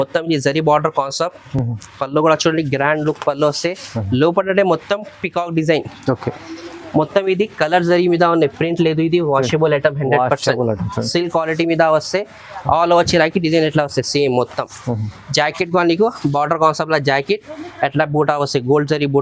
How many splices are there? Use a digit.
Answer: 0